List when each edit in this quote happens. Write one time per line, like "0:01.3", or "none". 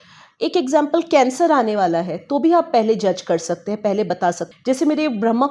0:04.4